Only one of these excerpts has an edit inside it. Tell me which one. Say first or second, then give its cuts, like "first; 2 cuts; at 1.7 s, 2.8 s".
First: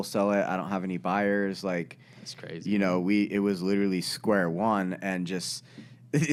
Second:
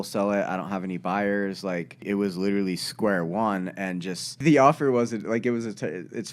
second; 2 cuts; at 2.0 s, 4.4 s